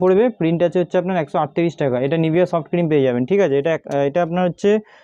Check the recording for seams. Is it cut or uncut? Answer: uncut